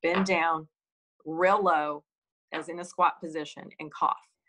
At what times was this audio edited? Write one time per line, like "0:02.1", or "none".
none